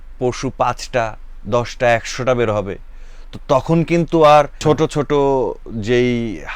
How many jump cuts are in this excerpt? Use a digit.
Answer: 1